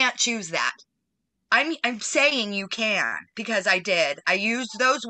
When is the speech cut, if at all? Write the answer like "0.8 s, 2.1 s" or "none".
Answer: none